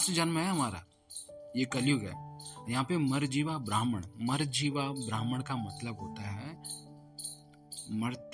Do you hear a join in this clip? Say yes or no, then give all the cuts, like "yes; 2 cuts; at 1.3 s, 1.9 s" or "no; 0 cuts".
no; 0 cuts